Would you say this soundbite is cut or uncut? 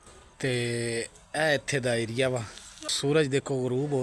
cut